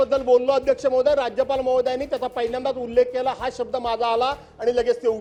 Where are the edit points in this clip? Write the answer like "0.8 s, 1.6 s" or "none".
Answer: none